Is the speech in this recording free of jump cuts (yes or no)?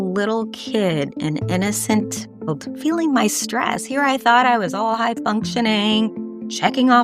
yes